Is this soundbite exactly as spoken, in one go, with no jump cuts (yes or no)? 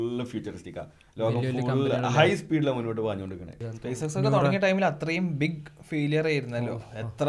no